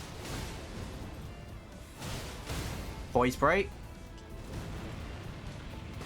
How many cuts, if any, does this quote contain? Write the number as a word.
one